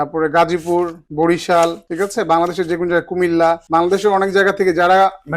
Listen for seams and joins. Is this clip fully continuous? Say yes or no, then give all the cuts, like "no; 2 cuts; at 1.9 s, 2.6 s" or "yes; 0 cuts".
no; 3 cuts; at 1.0 s, 1.8 s, 3.6 s